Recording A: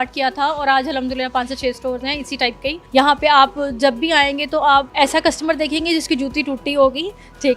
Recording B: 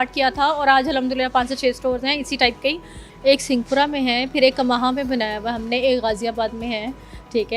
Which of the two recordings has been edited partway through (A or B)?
A